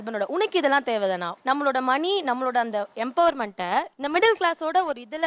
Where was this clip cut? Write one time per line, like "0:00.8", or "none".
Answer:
0:01.3
0:04.0